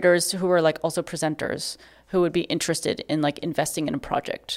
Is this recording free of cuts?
yes; 0 cuts

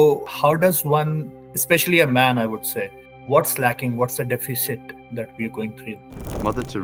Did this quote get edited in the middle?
no; 0 cuts

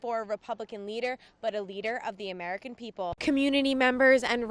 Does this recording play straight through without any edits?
no; 1 cut; at 3.1 s

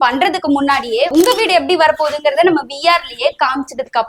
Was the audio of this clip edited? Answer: no; 0 cuts

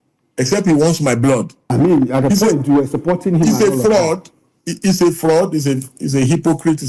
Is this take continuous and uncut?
no; 1 cut; at 1.6 s

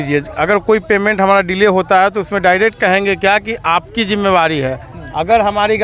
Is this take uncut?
yes; 0 cuts

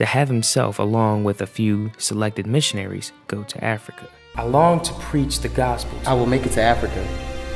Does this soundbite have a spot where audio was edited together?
yes; 2 cuts; at 4.1 s, 5.9 s

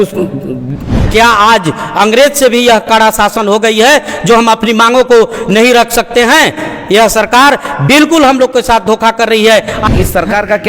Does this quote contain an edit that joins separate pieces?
yes; 2 cuts; at 1.0 s, 9.8 s

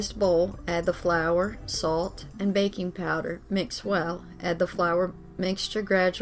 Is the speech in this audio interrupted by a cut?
no; 0 cuts

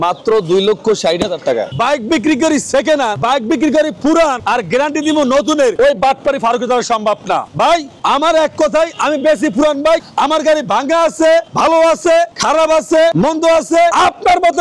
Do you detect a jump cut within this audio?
yes; 5 cuts; at 1.7 s, 3.2 s, 4.4 s, 5.7 s, 7.7 s

